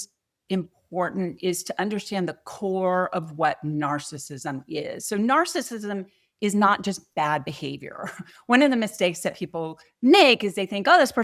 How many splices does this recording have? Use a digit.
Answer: 0